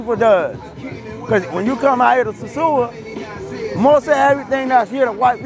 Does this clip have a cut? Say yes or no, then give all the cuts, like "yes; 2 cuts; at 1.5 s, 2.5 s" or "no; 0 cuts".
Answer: no; 0 cuts